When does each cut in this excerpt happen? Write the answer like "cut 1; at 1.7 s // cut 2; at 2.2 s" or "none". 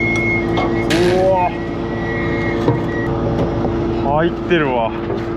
cut 1; at 3.1 s